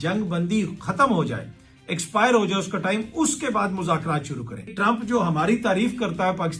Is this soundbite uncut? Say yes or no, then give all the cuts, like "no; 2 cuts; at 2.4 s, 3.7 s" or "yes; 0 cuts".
no; 1 cut; at 4.7 s